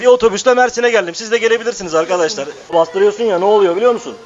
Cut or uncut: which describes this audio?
cut